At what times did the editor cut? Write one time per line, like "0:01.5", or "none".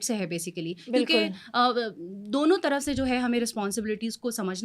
none